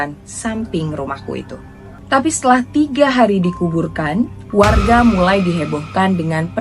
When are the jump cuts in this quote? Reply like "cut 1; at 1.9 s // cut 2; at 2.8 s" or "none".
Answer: cut 1; at 1.9 s